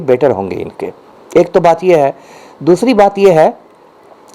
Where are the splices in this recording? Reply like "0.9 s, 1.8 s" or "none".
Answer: none

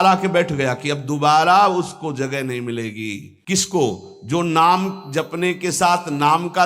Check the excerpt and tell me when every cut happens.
3.4 s

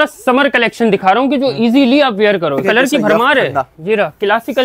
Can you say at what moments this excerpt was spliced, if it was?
2.6 s

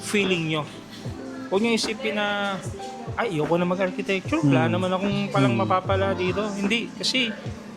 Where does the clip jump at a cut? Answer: none

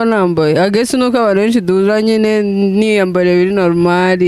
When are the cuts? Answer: none

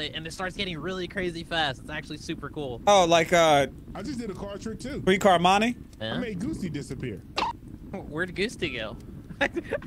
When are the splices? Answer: 7.4 s

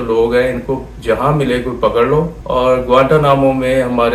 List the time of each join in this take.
2.4 s

